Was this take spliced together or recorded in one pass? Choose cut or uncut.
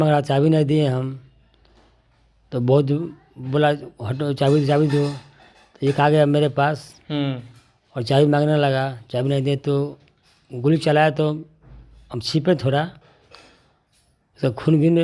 uncut